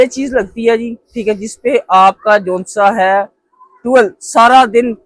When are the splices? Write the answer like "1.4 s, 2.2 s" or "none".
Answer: none